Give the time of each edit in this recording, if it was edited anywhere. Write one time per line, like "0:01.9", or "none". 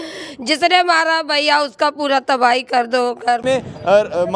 0:03.4